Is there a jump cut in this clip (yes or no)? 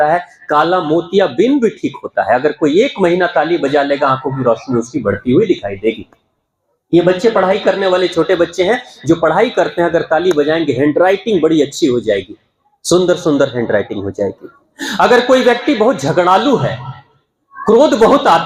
no